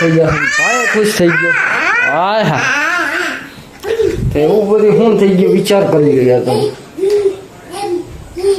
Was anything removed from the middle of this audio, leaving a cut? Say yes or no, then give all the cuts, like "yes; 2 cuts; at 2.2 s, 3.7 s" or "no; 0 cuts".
no; 0 cuts